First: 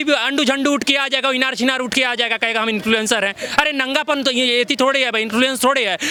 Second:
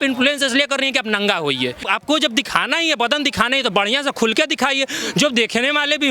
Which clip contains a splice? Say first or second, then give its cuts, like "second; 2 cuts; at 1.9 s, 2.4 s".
second; 1 cut; at 1.8 s